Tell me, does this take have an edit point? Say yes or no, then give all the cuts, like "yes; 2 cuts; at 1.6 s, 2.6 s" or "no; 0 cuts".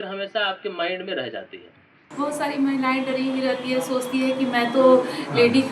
yes; 1 cut; at 2.0 s